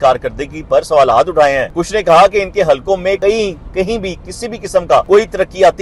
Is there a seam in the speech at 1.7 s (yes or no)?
yes